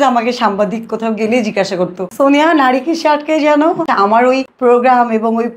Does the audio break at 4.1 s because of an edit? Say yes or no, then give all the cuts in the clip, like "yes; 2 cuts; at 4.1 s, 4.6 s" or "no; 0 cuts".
yes; 2 cuts; at 2.0 s, 4.1 s